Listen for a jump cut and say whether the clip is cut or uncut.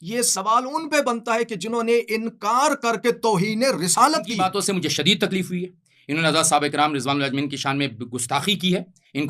cut